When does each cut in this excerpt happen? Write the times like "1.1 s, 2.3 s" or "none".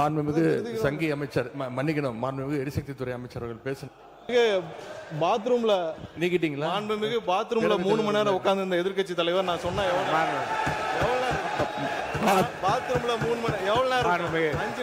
4.3 s